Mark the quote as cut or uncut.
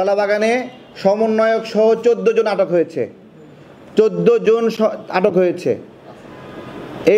uncut